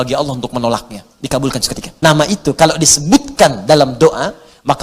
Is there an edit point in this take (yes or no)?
yes